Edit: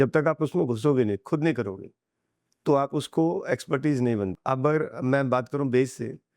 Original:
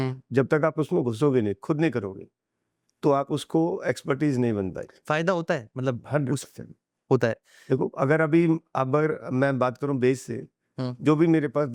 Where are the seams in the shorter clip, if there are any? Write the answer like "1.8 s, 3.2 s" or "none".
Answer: 4.4 s